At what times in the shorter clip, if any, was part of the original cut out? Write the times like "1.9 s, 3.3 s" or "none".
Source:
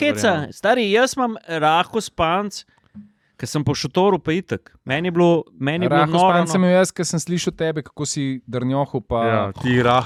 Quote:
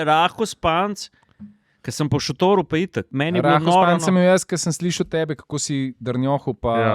3.1 s